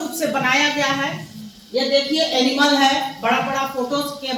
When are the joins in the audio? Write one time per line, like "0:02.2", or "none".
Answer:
none

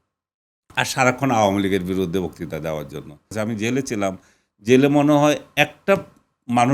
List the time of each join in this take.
0:03.3

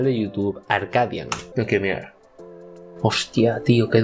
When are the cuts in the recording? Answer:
0:01.4

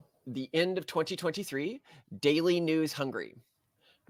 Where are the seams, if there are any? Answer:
none

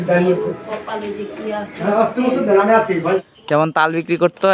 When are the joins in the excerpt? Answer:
0:03.2

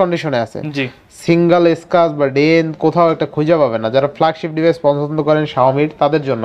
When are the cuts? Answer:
none

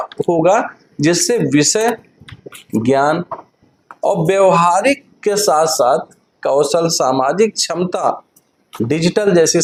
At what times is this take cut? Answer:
none

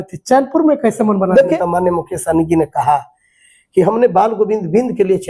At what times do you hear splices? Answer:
0:01.6

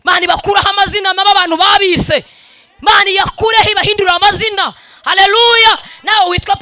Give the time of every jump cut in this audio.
none

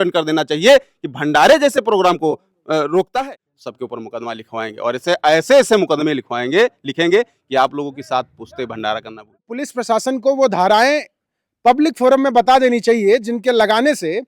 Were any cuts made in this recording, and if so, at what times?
0:03.3
0:09.6

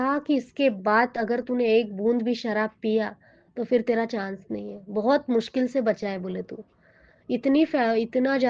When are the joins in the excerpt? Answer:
none

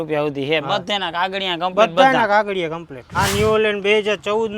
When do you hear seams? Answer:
0:03.0

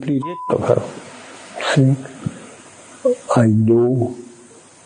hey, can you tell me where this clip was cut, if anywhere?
none

